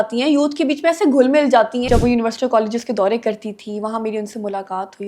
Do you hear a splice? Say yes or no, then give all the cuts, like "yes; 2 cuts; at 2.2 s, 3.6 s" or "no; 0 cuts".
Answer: yes; 1 cut; at 1.9 s